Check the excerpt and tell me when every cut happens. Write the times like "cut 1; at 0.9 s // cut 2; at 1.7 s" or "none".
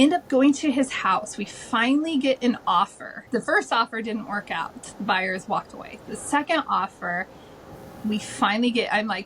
cut 1; at 3.2 s